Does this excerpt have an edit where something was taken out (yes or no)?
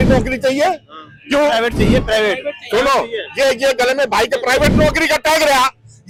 no